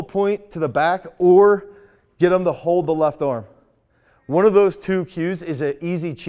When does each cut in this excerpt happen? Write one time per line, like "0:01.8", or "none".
none